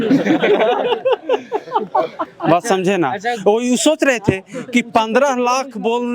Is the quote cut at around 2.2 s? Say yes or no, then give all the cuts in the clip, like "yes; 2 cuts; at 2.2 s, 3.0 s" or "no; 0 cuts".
no; 0 cuts